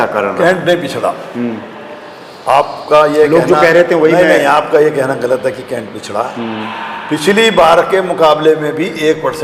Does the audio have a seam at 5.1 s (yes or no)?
no